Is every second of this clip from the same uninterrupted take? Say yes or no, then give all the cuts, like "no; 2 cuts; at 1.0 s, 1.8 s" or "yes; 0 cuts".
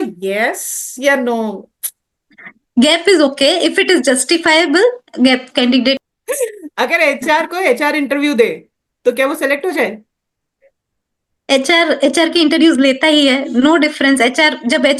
yes; 0 cuts